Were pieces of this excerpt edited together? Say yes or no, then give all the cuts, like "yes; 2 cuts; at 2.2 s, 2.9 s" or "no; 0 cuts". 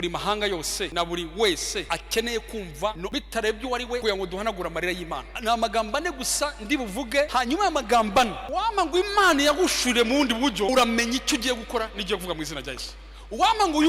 yes; 8 cuts; at 0.9 s, 1.9 s, 3.0 s, 4.0 s, 5.3 s, 7.3 s, 8.4 s, 10.7 s